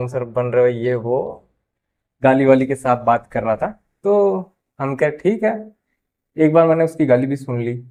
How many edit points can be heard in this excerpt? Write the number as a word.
zero